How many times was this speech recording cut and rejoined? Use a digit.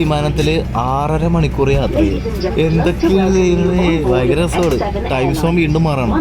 1